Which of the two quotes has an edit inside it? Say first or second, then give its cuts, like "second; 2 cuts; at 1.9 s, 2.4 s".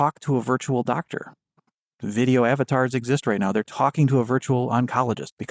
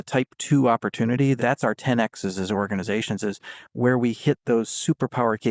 second; 1 cut; at 1.4 s